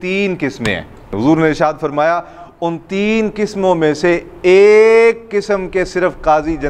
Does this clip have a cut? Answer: yes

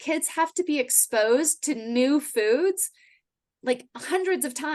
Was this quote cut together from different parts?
no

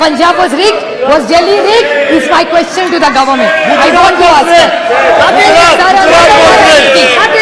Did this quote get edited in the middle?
no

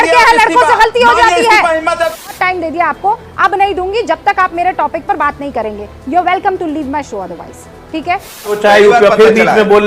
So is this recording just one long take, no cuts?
no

